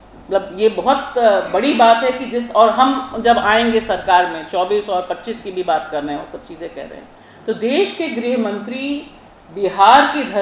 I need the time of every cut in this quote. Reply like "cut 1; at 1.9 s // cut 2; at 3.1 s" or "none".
none